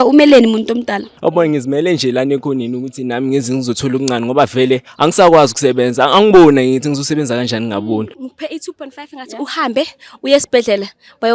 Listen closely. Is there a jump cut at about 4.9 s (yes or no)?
no